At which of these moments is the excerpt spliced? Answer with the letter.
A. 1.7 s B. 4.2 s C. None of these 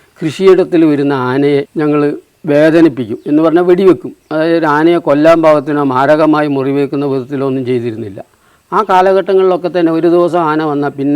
A